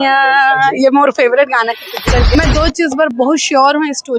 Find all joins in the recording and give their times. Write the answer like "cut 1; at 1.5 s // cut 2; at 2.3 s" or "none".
cut 1; at 2.4 s